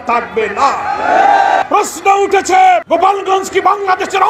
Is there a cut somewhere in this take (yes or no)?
yes